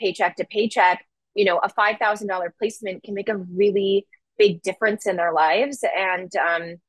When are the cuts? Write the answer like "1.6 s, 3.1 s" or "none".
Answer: none